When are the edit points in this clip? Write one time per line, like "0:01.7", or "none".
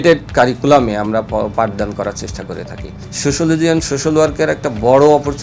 0:03.0

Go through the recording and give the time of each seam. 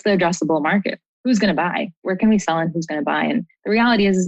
0:01.0
0:02.0

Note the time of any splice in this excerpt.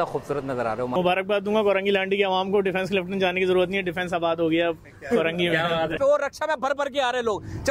0:00.9
0:05.9

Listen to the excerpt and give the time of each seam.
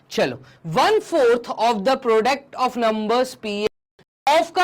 0:03.7

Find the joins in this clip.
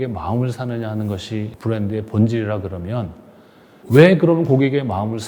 0:01.5

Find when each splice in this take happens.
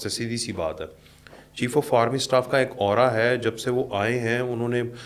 none

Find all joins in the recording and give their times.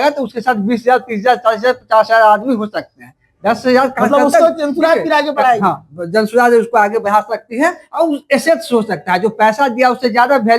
none

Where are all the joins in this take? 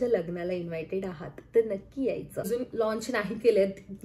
0:02.5

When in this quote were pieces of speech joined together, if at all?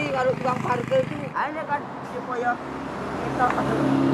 0:01.3

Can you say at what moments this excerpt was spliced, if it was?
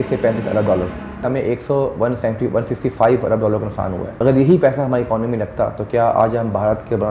0:01.2
0:04.1

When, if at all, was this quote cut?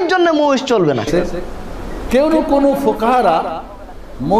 0:01.1

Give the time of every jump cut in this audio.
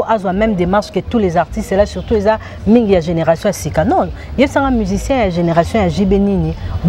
none

